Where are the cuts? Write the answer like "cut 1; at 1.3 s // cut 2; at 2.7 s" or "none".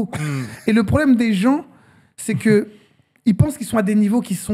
none